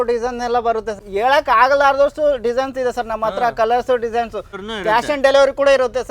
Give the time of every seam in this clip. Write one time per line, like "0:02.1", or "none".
0:01.0
0:04.6